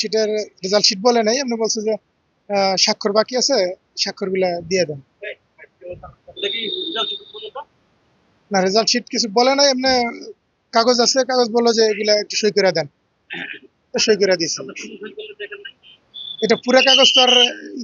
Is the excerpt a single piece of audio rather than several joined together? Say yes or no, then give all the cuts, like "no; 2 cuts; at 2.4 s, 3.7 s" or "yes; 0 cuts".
yes; 0 cuts